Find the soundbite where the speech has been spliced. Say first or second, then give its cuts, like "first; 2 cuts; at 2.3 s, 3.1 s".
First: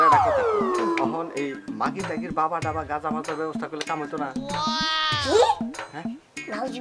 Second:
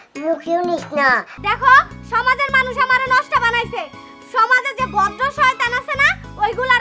second; 1 cut; at 1.3 s